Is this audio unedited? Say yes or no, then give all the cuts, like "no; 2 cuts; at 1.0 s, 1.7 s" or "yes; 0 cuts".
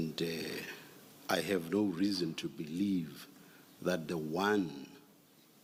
yes; 0 cuts